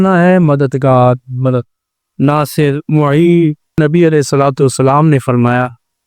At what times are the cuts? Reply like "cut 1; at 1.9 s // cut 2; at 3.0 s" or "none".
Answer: cut 1; at 3.8 s